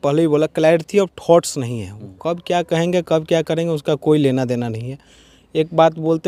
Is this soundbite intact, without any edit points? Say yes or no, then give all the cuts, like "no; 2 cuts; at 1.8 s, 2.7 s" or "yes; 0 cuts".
yes; 0 cuts